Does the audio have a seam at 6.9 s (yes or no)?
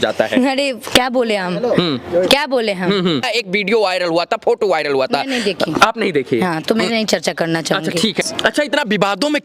no